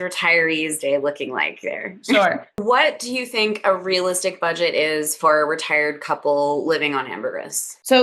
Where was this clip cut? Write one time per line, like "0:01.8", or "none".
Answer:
0:02.6